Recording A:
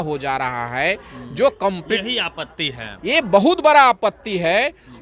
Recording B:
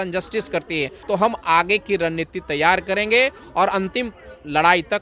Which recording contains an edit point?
B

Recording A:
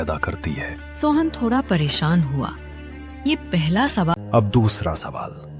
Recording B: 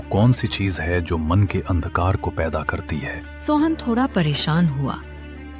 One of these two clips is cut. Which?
A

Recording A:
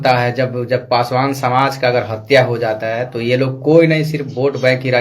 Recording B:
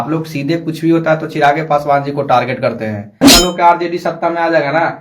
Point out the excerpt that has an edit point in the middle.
B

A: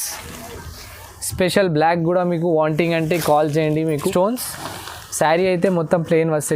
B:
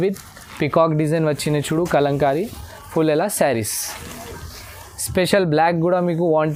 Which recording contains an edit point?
A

